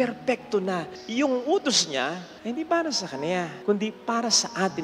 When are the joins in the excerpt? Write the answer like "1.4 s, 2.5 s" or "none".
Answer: 1.0 s, 2.3 s, 3.5 s